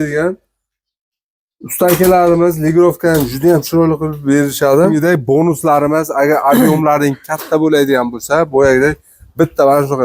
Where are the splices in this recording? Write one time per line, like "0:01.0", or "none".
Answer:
0:04.9